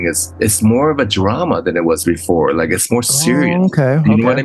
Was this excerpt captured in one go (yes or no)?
yes